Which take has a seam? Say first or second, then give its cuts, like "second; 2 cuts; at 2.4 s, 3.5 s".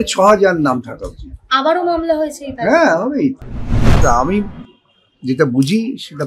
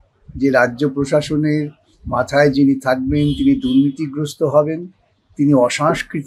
first; 1 cut; at 3.9 s